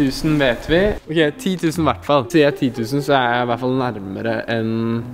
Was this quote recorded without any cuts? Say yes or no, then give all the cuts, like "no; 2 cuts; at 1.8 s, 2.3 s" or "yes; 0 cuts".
yes; 0 cuts